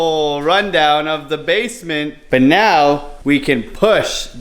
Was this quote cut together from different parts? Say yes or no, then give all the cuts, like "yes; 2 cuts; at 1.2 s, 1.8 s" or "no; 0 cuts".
yes; 1 cut; at 2.1 s